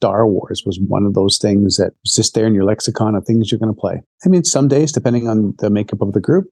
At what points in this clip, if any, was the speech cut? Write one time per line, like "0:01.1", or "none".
0:02.0
0:04.1